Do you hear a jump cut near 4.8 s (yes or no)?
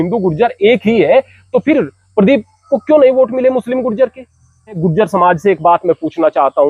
yes